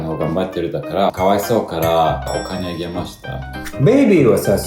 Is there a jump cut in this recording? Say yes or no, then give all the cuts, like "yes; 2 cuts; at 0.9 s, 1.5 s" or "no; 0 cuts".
yes; 3 cuts; at 1.1 s, 2.3 s, 3.7 s